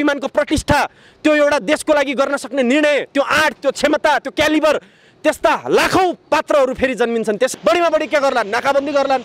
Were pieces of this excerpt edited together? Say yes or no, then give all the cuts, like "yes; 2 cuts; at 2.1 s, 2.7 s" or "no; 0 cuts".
yes; 1 cut; at 7.5 s